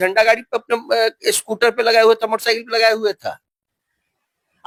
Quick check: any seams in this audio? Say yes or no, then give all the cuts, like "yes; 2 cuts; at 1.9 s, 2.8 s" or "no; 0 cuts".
no; 0 cuts